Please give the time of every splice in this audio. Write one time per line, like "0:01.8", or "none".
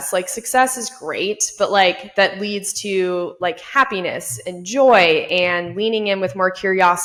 none

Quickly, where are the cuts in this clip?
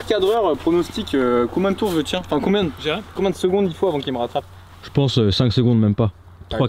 none

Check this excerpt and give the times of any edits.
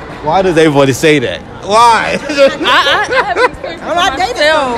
none

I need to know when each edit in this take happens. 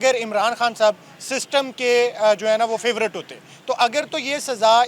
none

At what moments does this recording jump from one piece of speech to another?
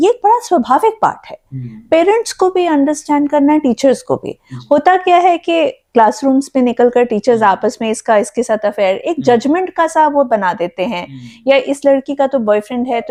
none

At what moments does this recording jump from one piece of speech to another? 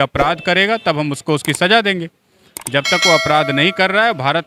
none

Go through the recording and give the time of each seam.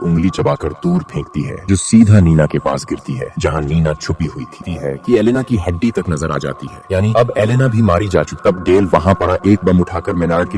0:04.6
0:08.3

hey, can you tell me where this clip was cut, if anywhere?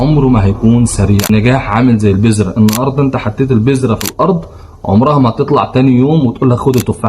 0:01.3

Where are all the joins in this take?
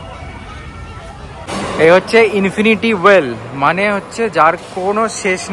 0:01.5

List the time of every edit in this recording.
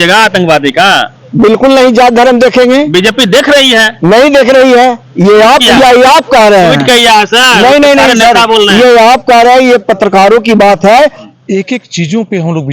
0:11.2

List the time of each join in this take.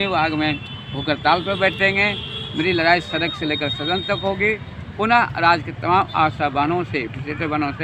none

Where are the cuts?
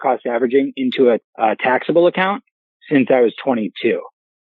0:01.3

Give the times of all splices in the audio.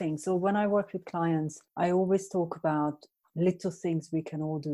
0:01.6

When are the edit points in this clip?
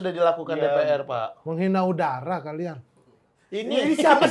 none

